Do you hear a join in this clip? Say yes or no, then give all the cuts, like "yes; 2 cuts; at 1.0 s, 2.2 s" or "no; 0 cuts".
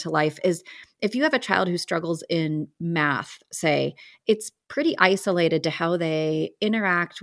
no; 0 cuts